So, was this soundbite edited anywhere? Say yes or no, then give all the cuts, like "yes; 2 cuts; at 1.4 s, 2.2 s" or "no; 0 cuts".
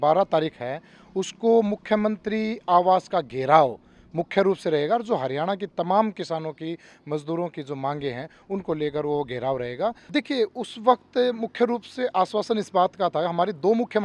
yes; 1 cut; at 10.0 s